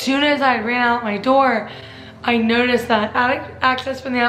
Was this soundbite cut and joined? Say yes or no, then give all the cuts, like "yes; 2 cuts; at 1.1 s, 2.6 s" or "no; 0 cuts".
no; 0 cuts